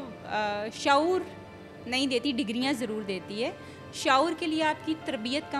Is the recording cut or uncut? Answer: uncut